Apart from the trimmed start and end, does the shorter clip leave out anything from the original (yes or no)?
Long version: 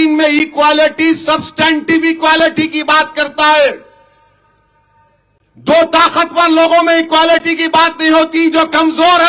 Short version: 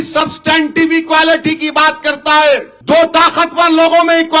yes